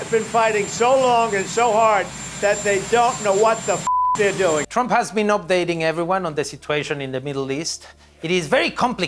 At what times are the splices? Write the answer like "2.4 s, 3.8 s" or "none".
4.7 s